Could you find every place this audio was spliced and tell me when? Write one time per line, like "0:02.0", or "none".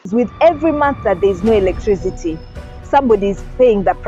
none